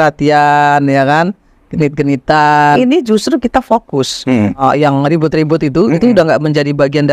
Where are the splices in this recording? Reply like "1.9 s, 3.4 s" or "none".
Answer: 2.8 s, 4.6 s